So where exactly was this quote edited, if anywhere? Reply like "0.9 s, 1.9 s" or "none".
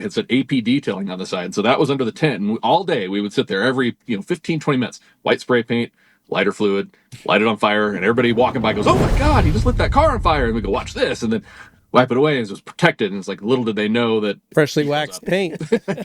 14.4 s